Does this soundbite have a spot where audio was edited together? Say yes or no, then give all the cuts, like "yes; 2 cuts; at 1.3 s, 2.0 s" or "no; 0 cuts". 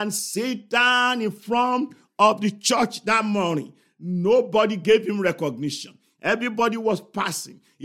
no; 0 cuts